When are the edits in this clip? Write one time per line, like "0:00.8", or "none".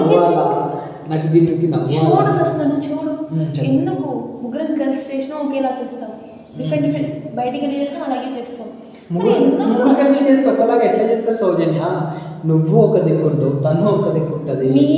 none